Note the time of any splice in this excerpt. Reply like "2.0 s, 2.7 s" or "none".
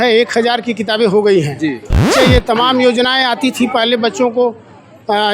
2.1 s

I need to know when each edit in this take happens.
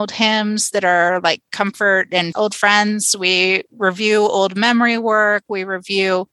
2.3 s

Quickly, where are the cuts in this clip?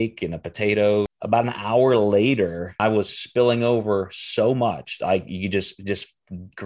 1.2 s, 2.8 s

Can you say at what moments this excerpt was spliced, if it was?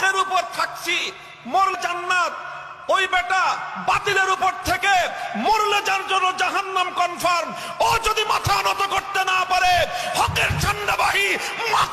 1.8 s

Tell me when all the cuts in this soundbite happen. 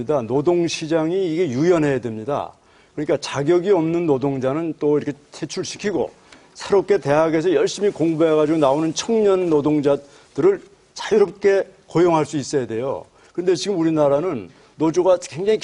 none

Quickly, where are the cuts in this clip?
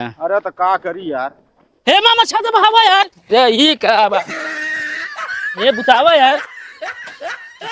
6.5 s

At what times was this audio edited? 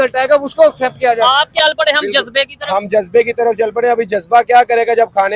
1.5 s

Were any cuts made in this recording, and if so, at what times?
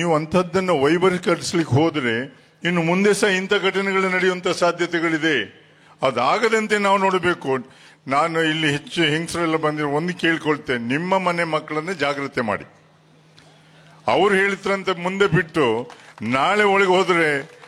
none

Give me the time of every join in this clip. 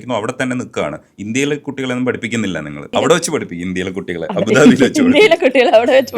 2.9 s

